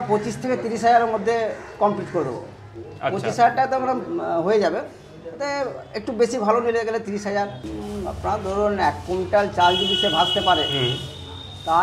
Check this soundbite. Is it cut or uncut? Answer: cut